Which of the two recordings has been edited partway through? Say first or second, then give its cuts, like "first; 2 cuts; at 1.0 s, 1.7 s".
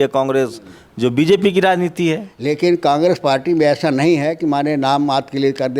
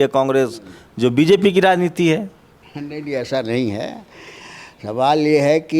first; 1 cut; at 2.3 s